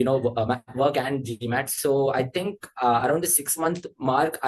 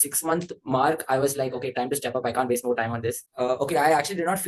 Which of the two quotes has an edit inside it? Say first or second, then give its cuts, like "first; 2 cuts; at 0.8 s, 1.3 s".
second; 1 cut; at 3.2 s